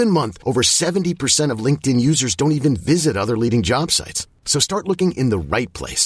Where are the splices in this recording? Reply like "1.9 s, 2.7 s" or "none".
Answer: none